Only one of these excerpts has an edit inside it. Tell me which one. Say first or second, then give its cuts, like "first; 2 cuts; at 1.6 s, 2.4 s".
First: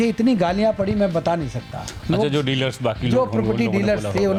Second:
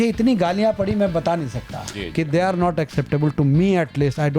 second; 1 cut; at 1.9 s